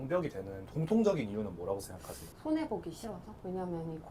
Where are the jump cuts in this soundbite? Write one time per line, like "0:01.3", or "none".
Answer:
none